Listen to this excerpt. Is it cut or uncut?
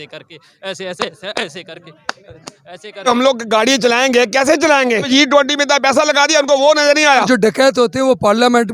cut